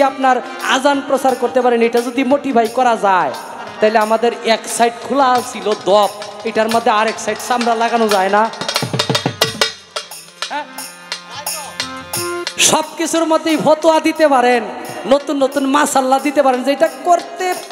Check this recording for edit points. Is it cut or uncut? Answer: uncut